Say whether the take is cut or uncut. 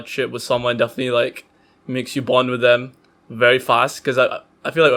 uncut